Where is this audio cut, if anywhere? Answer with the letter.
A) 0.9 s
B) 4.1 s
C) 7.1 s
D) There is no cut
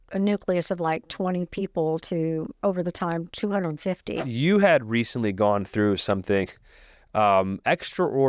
B